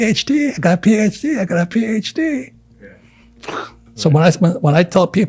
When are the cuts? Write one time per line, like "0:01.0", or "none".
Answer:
0:03.8